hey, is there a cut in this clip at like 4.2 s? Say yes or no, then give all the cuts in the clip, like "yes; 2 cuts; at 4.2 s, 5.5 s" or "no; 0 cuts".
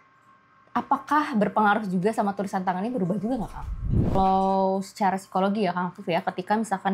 yes; 1 cut; at 4.2 s